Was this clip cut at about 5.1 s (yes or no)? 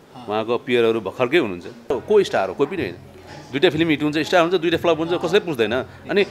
no